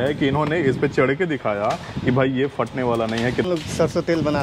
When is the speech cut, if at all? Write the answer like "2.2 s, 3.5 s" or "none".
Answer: 3.5 s